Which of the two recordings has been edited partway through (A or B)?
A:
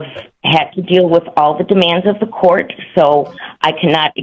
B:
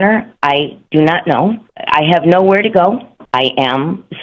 B